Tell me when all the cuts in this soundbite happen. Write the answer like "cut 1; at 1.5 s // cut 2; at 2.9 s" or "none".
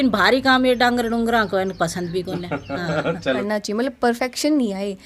cut 1; at 3.4 s